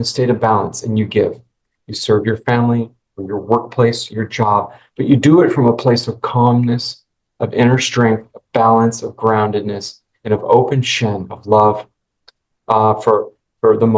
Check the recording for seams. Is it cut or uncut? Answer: uncut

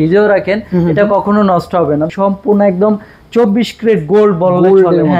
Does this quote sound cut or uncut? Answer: cut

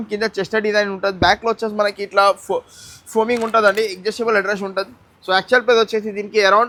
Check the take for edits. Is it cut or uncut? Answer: uncut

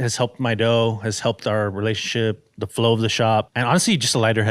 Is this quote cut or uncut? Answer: cut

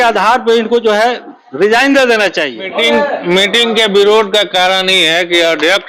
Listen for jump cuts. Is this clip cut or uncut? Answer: cut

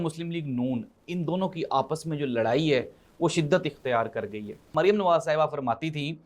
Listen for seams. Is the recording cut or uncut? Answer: cut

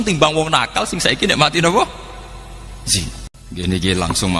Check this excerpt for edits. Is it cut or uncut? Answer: cut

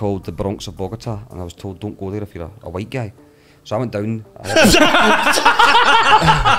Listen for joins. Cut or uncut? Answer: uncut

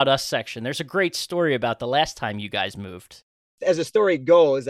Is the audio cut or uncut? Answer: cut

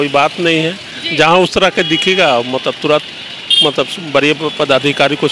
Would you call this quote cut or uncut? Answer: uncut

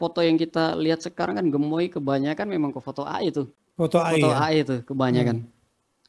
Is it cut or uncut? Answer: cut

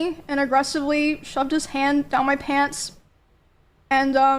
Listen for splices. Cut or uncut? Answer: uncut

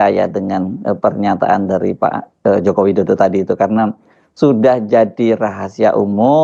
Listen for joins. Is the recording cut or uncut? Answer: uncut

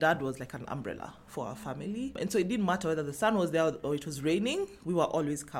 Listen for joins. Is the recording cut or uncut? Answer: cut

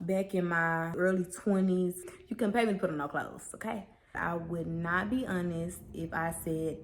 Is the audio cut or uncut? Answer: cut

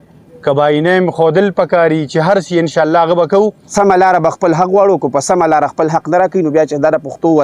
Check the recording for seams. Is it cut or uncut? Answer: cut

